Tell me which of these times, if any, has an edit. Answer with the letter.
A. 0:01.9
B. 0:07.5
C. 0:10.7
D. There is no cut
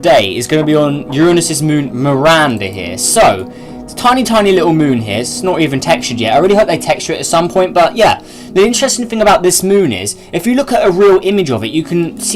B